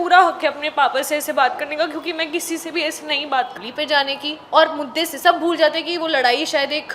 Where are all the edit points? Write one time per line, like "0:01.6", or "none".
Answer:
0:03.5